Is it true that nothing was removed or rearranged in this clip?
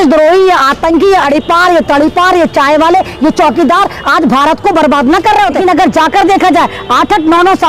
no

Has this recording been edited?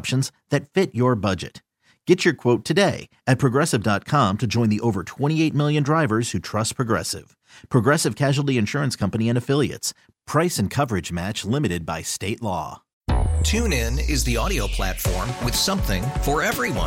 yes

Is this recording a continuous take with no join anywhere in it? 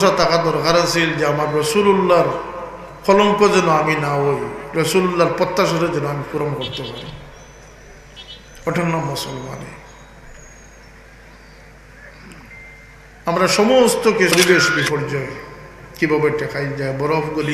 no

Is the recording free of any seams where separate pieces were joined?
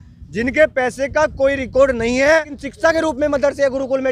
no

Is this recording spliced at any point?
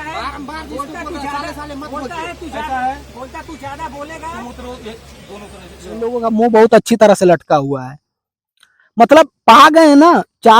yes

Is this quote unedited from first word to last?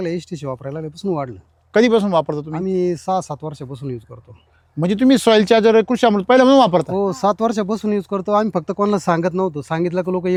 yes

